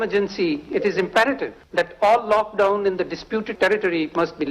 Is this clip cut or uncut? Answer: cut